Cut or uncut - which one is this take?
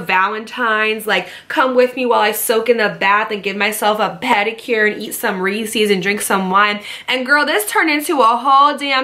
uncut